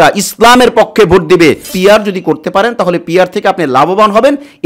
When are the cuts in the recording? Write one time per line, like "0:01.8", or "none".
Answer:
0:01.7